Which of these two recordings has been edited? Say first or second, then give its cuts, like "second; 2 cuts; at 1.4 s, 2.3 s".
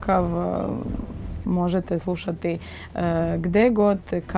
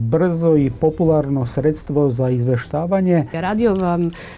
second; 1 cut; at 3.4 s